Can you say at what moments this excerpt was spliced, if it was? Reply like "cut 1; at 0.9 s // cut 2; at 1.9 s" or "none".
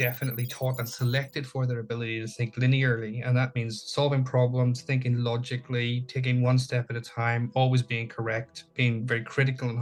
none